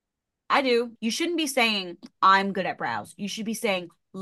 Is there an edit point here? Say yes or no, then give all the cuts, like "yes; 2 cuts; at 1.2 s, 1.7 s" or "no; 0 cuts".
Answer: yes; 1 cut; at 0.9 s